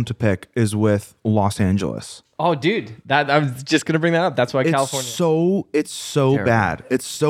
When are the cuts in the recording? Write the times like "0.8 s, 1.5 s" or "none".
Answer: none